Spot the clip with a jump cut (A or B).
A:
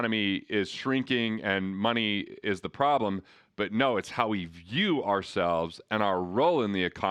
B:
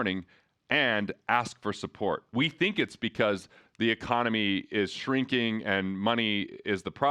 B